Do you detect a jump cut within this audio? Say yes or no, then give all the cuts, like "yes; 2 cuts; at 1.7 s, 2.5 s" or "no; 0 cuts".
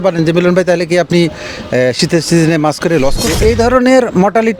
yes; 1 cut; at 3.2 s